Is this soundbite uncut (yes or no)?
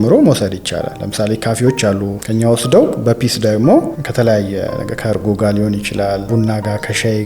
no